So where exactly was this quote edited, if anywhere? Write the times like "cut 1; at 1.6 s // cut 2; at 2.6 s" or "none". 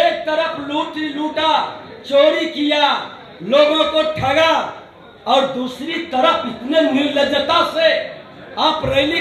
none